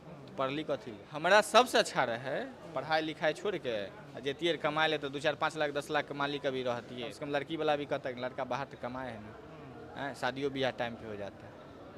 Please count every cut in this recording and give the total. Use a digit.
2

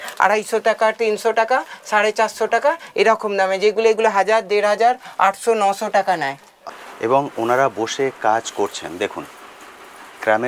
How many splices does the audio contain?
1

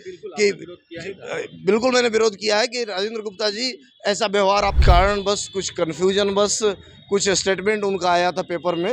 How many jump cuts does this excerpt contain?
1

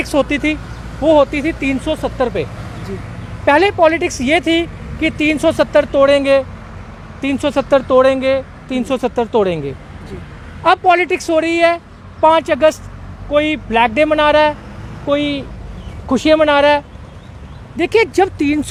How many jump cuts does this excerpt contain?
0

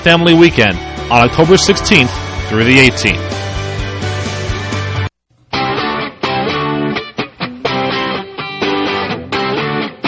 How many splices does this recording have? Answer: 1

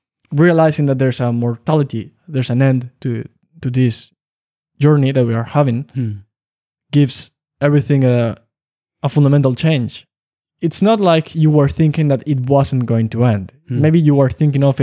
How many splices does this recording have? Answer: 0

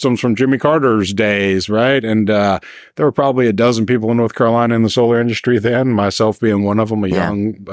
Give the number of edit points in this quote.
0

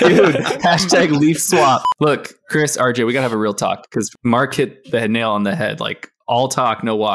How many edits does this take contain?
2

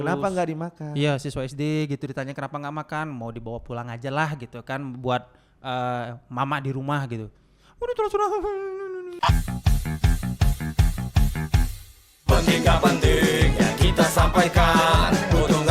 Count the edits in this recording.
1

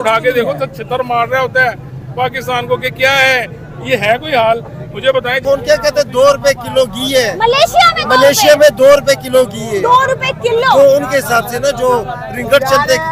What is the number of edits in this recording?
1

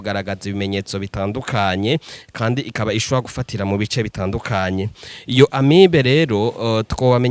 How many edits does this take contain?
0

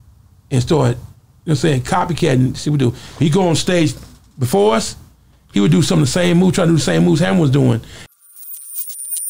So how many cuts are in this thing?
1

